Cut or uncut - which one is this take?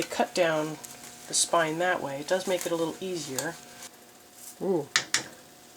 cut